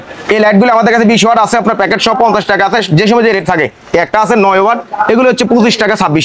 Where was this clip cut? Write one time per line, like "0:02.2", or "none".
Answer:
none